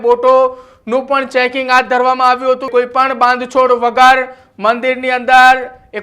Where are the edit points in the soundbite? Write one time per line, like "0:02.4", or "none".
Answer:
0:02.7

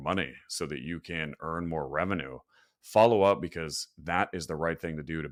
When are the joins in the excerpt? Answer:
none

